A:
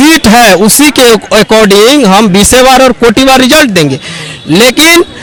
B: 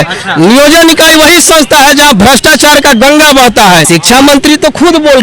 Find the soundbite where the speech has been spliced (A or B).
B